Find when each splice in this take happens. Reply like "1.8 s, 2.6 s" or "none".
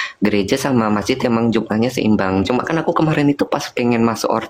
none